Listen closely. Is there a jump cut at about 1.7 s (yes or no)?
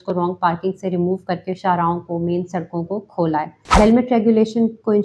no